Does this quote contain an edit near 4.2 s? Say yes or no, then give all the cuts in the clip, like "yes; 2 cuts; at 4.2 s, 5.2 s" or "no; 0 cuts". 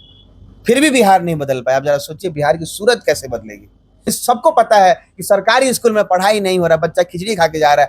yes; 1 cut; at 4.2 s